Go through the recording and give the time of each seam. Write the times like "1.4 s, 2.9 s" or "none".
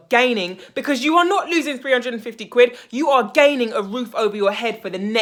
none

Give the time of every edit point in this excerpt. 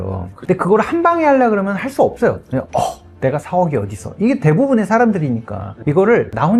none

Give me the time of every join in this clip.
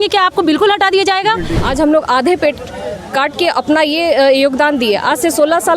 1.6 s

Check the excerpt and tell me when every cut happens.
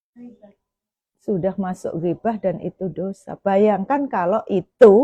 none

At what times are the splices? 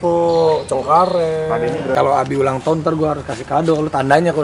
2.0 s

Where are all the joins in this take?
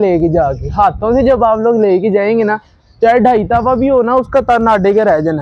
none

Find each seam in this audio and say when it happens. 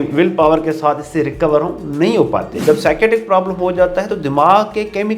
2.5 s

